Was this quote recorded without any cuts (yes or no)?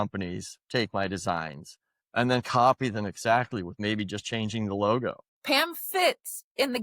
no